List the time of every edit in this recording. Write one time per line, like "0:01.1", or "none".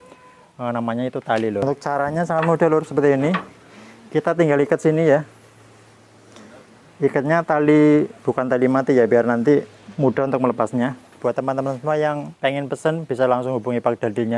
0:01.6
0:11.2